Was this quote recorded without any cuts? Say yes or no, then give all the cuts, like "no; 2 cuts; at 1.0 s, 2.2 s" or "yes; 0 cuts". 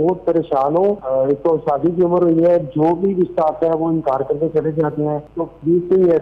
no; 2 cuts; at 1.0 s, 5.3 s